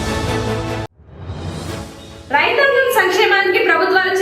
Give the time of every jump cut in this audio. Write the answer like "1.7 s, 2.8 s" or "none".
0.9 s, 2.0 s

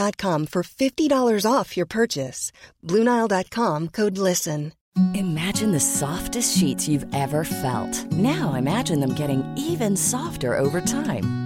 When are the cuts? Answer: 4.9 s

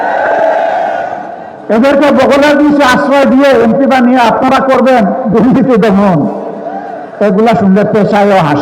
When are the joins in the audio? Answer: none

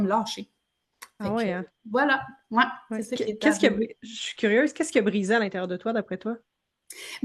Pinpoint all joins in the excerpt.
none

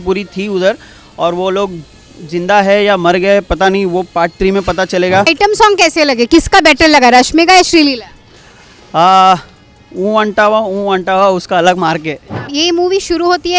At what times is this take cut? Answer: 5.3 s, 12.5 s

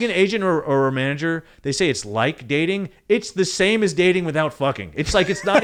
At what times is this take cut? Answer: none

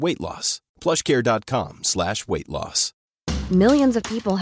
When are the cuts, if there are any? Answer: none

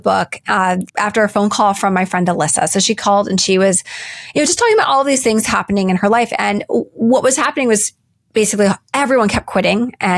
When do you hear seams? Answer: 0.9 s

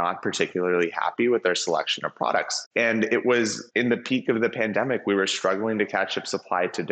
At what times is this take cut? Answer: 2.6 s, 3.6 s

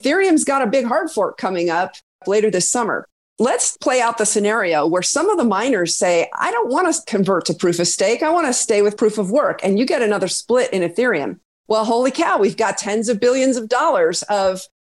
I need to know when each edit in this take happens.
2.2 s, 3.5 s

